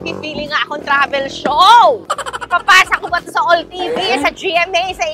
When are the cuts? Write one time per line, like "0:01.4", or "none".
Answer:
none